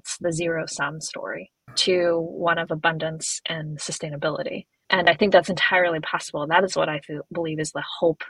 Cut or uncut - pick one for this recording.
cut